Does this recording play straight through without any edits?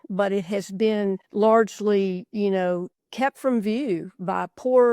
no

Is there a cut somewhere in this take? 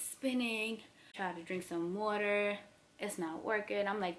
yes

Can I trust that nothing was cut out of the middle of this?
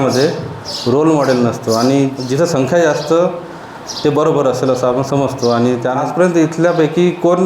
no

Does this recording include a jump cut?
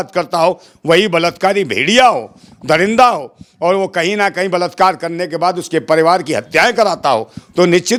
no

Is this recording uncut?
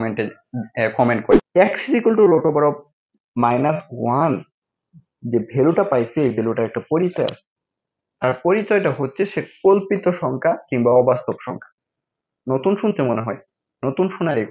no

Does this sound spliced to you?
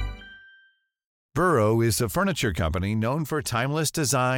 yes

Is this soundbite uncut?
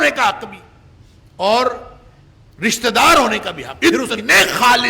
no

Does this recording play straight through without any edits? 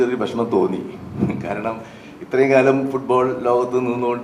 yes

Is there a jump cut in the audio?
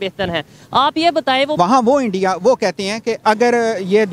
yes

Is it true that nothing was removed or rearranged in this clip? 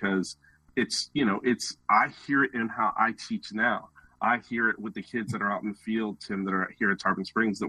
yes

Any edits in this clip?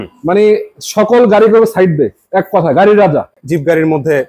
yes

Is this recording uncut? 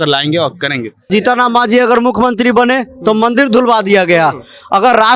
no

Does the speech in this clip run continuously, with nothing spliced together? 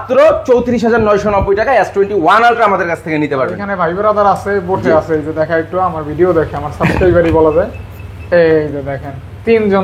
yes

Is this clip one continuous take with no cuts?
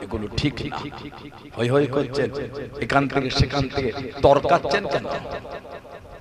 yes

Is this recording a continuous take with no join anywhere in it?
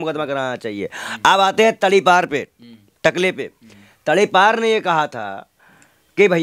yes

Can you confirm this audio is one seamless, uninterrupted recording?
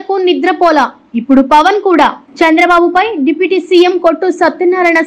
yes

